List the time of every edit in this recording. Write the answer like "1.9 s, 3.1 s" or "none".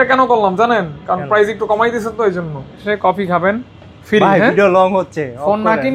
2.8 s